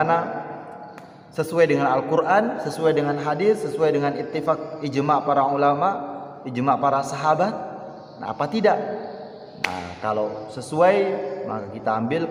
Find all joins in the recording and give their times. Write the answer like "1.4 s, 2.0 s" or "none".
none